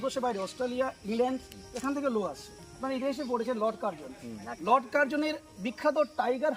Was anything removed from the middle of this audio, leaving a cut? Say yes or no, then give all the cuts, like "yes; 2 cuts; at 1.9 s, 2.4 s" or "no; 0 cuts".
yes; 1 cut; at 2.8 s